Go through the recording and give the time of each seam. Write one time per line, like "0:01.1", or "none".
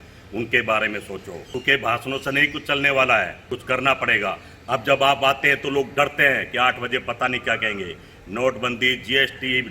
0:01.5
0:03.4